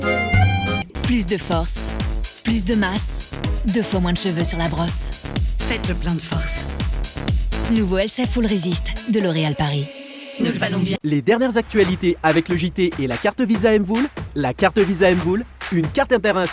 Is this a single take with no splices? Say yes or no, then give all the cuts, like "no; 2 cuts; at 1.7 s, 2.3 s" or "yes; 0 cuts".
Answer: no; 2 cuts; at 0.9 s, 11.0 s